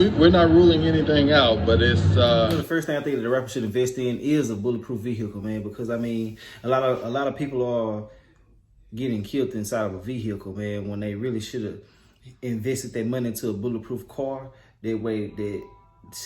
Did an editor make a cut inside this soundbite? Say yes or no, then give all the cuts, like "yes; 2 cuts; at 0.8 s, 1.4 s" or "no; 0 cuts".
yes; 1 cut; at 2.6 s